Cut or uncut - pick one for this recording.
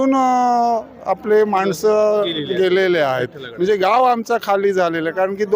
uncut